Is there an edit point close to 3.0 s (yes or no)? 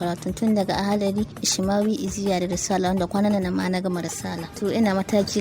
no